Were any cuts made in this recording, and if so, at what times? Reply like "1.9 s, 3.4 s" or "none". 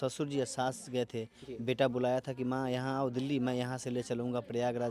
none